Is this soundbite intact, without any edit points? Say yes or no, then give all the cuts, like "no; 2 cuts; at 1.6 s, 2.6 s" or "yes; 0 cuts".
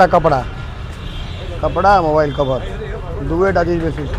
yes; 0 cuts